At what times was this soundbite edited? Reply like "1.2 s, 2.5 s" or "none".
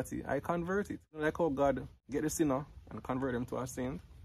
1.2 s, 2.0 s